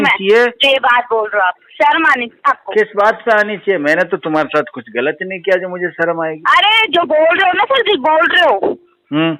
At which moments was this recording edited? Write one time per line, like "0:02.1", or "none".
none

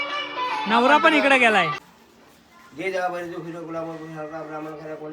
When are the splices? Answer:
0:01.8

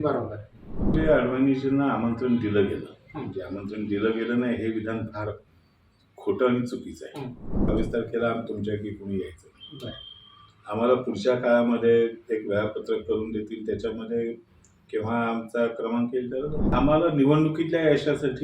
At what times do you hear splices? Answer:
0:00.9
0:07.7
0:16.7

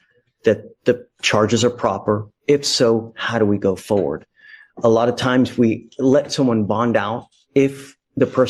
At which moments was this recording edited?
none

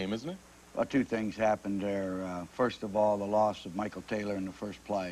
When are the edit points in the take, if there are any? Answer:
0:04.2

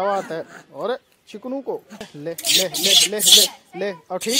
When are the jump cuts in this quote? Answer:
0:02.1

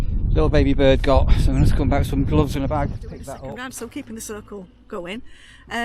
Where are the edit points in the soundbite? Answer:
0:03.3

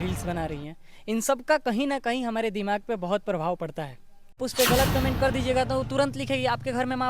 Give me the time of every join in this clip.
0:04.4

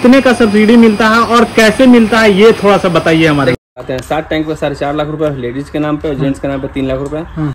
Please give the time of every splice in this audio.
0:03.6

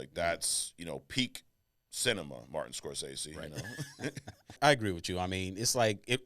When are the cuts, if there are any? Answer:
0:04.6

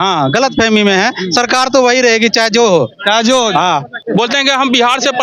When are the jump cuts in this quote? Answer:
0:03.9

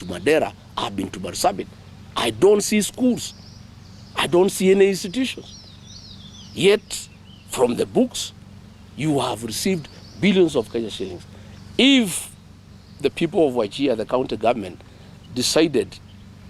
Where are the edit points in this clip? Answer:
none

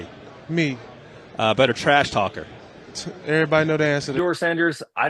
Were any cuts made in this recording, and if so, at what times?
0:04.1

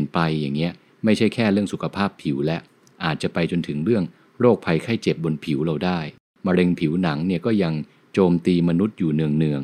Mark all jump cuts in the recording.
0:06.2

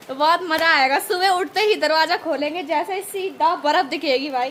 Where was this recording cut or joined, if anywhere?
none

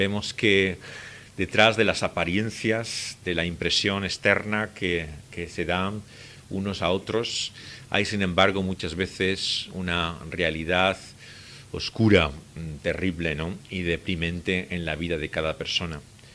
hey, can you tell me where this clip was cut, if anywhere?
0:13.6

